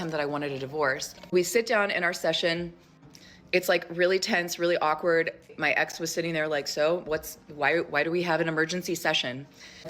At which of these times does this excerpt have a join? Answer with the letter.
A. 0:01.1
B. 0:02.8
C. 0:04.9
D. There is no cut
A